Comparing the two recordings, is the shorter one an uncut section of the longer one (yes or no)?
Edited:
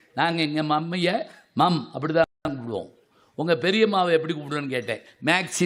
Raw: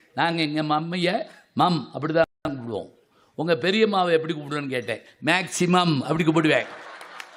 yes